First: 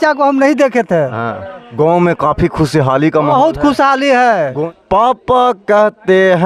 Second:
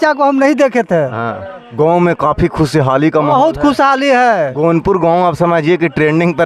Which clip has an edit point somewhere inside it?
first; 1 cut; at 4.6 s

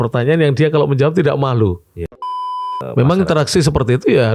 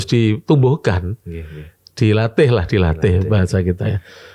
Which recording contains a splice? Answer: first; 1 cut; at 2.3 s

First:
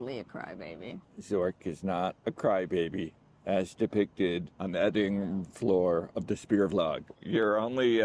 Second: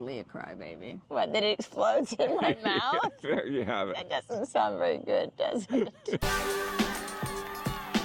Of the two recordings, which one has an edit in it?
first; 3 cuts; at 1.0 s, 4.5 s, 7.1 s

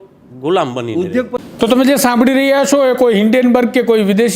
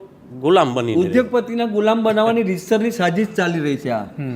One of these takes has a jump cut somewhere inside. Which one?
first; 1 cut; at 1.4 s

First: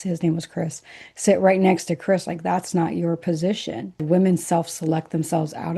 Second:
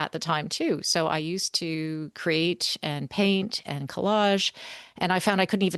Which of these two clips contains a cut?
first; 1 cut; at 4.0 s

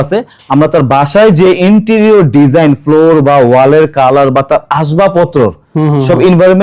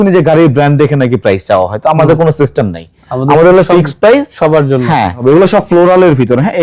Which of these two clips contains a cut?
second; 1 cut; at 5.2 s

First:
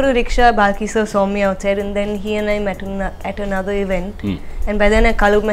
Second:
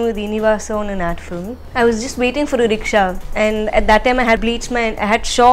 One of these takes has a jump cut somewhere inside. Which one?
second; 3 cuts; at 1.6 s, 3.2 s, 4.4 s

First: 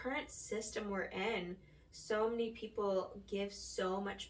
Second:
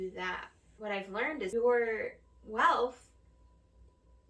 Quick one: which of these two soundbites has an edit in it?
second; 1 cut; at 1.5 s

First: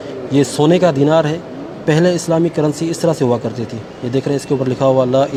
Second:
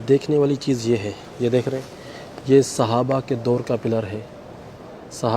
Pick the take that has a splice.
second; 1 cut; at 1.2 s

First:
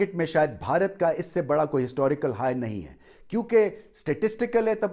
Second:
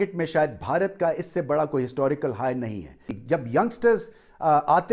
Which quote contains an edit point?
second; 1 cut; at 3.1 s

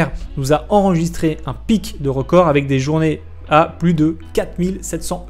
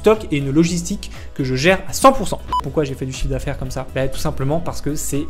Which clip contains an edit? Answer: second; 1 cut; at 2.4 s

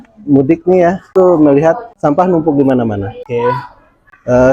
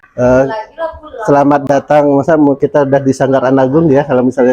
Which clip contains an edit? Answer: first; 3 cuts; at 1.0 s, 1.9 s, 3.2 s

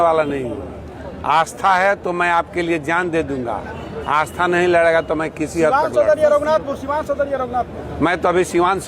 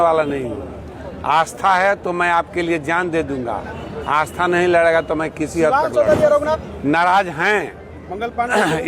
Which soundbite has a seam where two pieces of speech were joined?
second; 1 cut; at 6.5 s

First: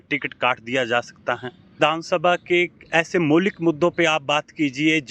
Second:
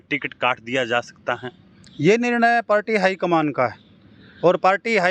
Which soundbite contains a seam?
first; 1 cut; at 1.8 s

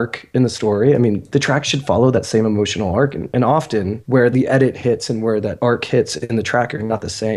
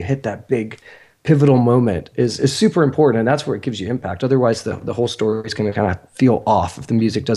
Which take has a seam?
first; 3 cuts; at 1.2 s, 4.2 s, 5.5 s

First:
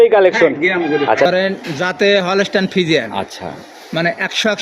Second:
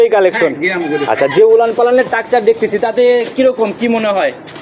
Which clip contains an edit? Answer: first; 1 cut; at 1.3 s

